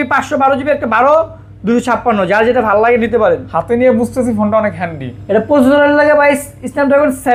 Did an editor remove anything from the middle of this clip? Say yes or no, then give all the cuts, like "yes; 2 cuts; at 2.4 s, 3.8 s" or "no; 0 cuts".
no; 0 cuts